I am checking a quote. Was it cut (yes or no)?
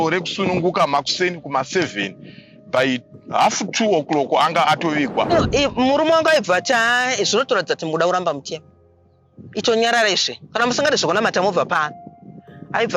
yes